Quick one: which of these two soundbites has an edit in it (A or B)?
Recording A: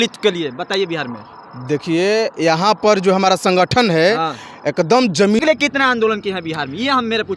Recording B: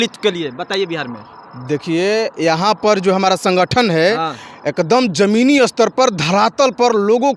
A